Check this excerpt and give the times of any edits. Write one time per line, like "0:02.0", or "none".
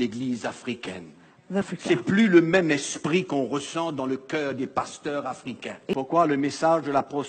0:01.7
0:05.9

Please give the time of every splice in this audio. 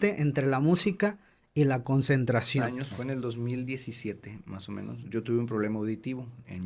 0:02.8

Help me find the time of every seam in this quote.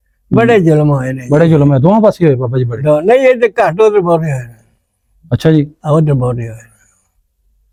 none

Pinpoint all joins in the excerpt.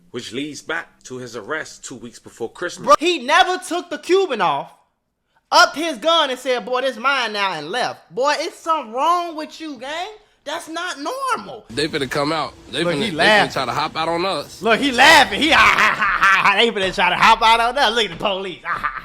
0:02.9
0:11.6

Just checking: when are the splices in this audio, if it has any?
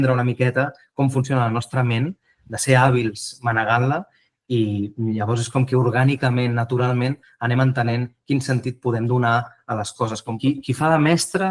0:10.3

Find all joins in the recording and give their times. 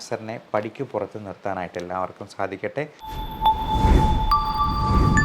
0:03.0

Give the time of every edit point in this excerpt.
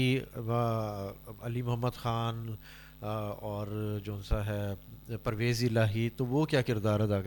none

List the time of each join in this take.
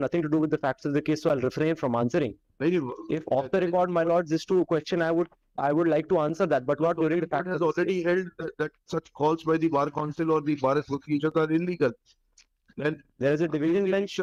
none

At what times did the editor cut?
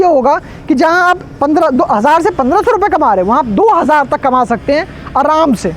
none

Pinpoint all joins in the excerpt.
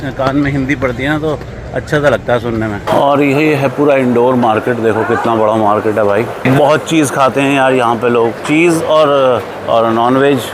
0:02.8
0:06.5

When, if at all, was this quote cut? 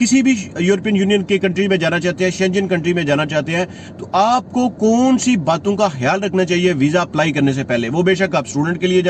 none

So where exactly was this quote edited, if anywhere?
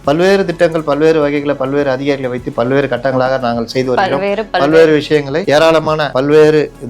0:05.4
0:06.1

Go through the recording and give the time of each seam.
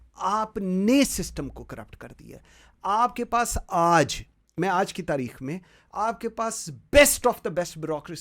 none

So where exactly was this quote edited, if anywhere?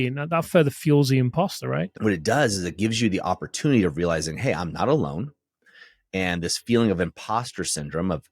0:01.9

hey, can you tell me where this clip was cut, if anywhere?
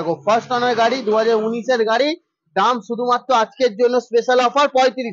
none

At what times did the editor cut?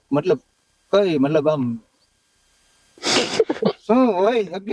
none

